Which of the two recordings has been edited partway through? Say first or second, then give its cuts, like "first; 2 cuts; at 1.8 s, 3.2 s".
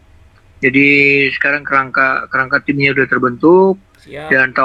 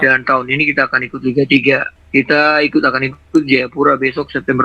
second; 1 cut; at 1.9 s